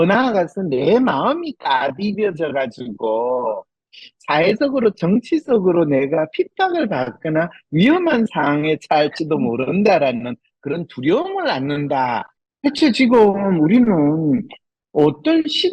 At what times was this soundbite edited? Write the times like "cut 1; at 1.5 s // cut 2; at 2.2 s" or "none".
cut 1; at 12.3 s